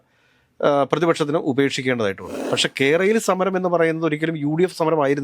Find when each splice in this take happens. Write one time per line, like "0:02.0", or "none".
0:02.4